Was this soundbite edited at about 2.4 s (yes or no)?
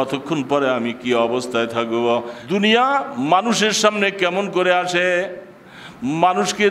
yes